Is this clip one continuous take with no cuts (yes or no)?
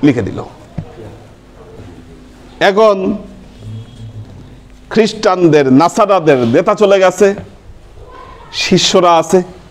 no